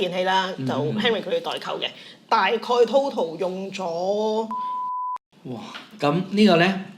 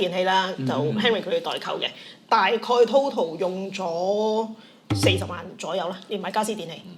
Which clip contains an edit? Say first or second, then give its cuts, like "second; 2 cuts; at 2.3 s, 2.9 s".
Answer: first; 1 cut; at 4.9 s